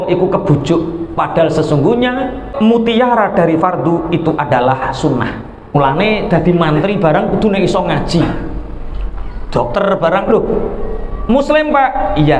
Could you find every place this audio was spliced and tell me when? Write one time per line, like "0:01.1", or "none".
0:02.5
0:05.8

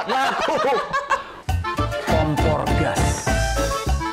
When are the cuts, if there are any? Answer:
0:01.4

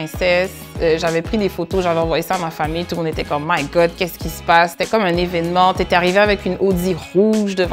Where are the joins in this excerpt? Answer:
none

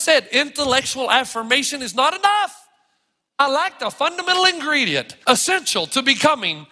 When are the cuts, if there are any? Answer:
0:03.4
0:05.1

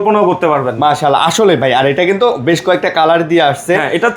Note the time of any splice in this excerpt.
none

